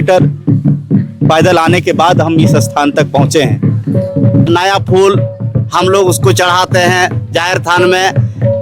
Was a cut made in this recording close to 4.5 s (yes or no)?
yes